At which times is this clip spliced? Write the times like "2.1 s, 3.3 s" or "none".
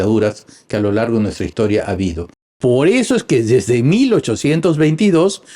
2.5 s